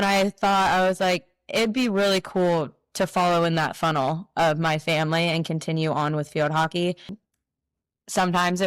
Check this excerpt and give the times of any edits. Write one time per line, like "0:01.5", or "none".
0:07.2